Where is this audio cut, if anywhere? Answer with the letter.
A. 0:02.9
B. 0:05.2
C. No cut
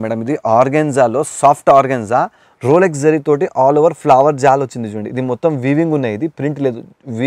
C